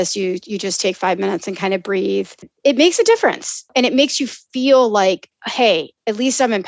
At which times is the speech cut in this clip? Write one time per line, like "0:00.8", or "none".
0:02.5
0:03.7